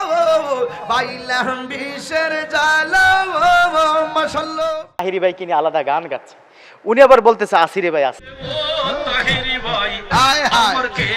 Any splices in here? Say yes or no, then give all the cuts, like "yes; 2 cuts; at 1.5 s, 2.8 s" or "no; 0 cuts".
yes; 1 cut; at 5.0 s